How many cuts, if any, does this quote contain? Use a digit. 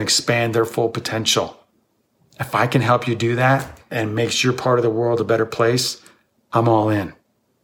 0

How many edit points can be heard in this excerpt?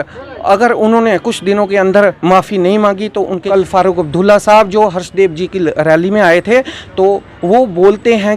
1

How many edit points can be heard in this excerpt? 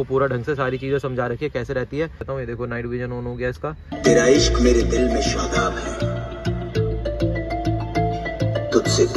2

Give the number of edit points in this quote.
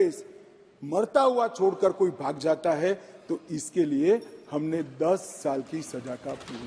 0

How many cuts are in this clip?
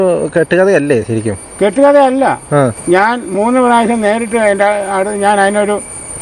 1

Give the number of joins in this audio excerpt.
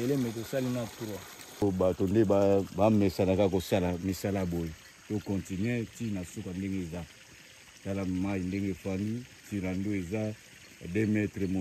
1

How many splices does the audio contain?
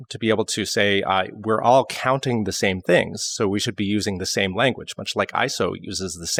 0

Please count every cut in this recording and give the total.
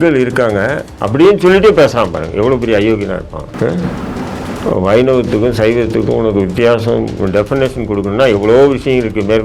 1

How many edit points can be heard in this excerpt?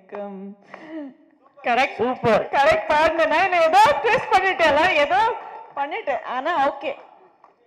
0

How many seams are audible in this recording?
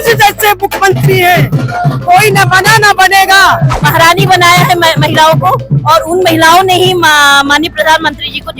1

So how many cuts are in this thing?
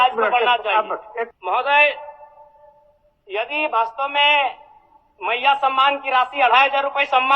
1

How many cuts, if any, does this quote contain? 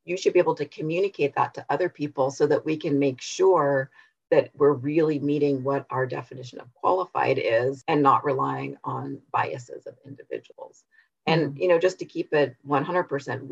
1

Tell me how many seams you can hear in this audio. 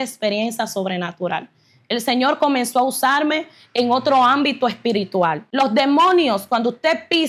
1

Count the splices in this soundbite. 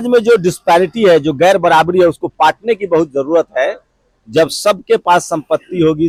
0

